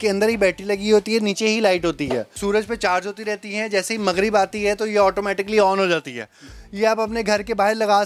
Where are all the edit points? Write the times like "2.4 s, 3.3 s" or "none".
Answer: 2.4 s, 6.5 s